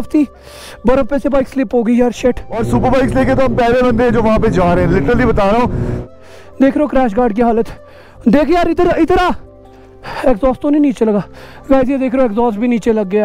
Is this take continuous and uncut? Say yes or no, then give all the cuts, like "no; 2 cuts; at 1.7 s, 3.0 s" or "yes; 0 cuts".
no; 2 cuts; at 2.5 s, 5.9 s